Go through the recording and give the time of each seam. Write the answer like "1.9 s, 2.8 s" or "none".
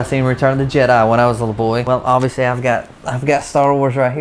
1.8 s